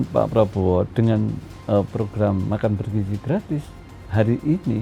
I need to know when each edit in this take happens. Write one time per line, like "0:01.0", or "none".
none

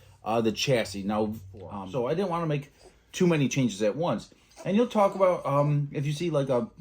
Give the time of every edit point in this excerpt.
0:01.8

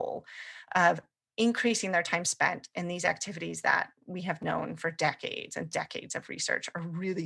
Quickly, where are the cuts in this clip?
none

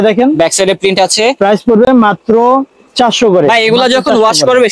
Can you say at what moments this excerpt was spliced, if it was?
none

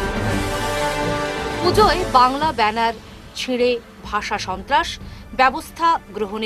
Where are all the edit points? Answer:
0:01.5

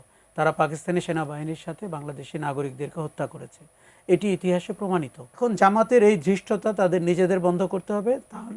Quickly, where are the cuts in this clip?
0:05.4

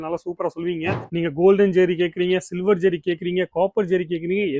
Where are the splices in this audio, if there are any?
0:01.0

